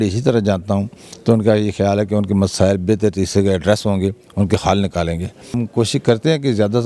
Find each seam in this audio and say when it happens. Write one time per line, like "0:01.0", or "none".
0:05.6